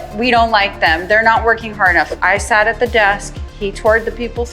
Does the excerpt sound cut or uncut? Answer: cut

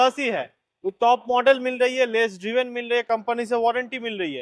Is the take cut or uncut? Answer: uncut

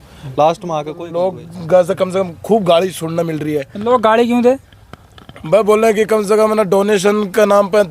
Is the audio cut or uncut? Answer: cut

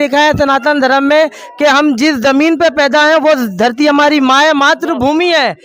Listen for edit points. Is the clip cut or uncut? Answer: uncut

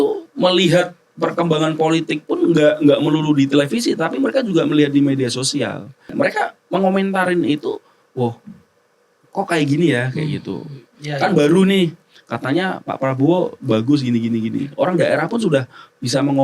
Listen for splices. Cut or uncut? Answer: cut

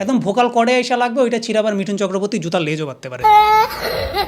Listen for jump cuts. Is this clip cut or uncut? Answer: cut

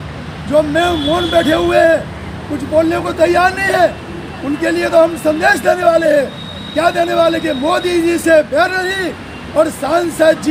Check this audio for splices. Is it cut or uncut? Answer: uncut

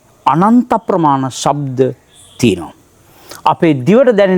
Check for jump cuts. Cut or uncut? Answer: uncut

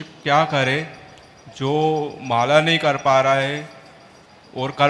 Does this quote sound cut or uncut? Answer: uncut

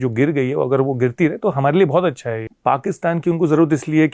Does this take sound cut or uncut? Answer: cut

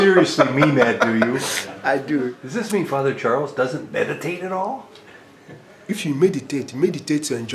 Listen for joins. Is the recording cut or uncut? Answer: cut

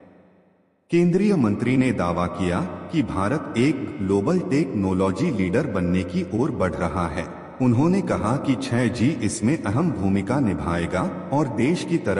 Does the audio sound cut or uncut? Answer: cut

